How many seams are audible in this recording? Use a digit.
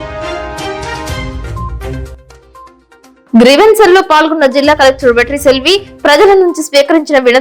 1